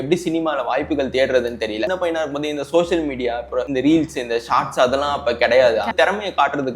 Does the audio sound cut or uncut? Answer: cut